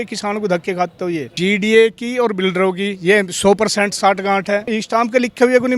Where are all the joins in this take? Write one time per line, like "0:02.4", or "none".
0:01.3
0:04.7